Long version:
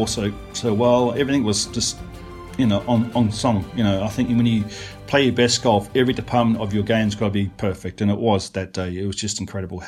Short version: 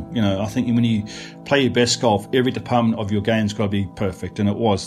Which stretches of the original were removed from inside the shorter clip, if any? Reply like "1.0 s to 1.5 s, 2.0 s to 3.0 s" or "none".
none

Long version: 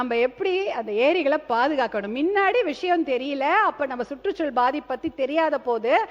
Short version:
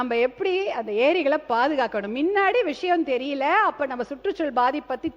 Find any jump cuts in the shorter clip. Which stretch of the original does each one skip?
none

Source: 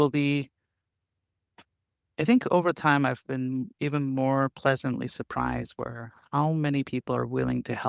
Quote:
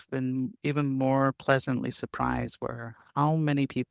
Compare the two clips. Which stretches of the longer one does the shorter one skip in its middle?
none

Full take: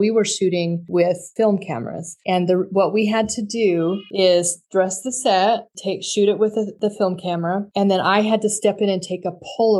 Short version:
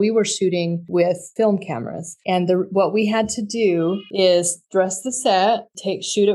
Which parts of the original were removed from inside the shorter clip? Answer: none

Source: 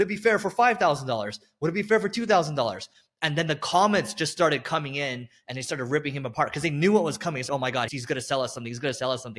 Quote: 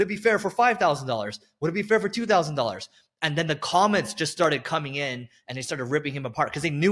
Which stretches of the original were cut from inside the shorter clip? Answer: none

